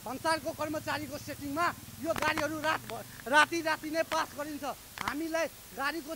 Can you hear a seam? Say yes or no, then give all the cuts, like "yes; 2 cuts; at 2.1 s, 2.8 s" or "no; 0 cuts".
no; 0 cuts